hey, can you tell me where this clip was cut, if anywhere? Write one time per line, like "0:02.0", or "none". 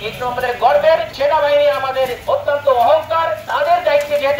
0:01.1
0:02.2
0:03.4